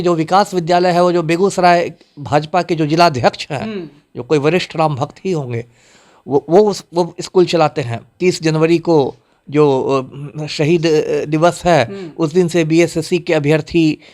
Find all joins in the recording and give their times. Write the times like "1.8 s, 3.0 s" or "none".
8.2 s